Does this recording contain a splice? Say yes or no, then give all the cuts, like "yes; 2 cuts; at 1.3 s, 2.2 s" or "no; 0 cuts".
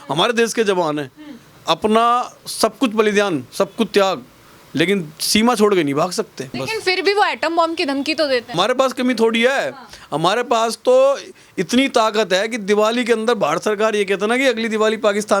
no; 0 cuts